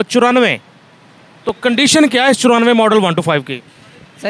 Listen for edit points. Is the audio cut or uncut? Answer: uncut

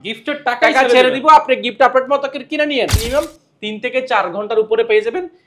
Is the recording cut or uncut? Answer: cut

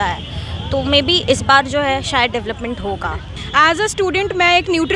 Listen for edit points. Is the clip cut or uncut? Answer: cut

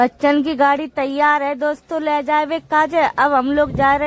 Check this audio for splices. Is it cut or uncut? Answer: uncut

